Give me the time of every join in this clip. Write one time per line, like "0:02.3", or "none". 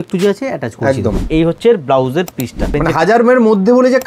0:01.3
0:02.7